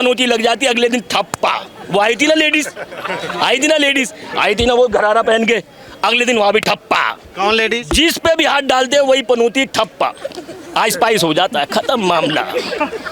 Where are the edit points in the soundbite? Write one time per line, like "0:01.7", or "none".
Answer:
none